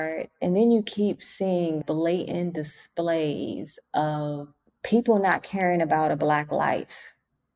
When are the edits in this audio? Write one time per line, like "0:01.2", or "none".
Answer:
0:01.8

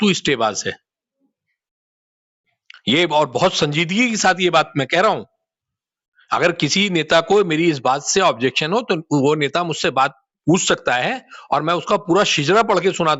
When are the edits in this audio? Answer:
none

